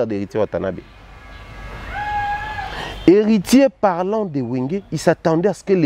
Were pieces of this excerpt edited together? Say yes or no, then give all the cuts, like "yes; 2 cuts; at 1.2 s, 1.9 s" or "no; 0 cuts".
no; 0 cuts